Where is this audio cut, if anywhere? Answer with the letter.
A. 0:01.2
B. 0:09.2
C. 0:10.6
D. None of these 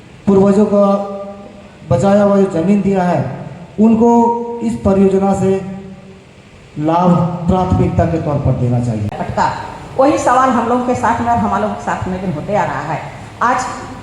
B